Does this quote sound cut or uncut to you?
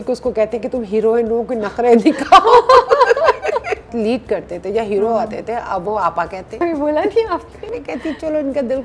cut